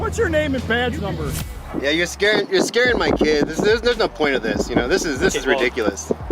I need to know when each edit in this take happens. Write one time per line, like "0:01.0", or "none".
0:01.5